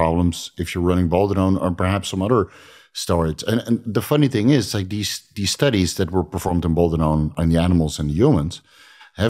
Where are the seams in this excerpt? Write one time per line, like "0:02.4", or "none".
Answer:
0:07.3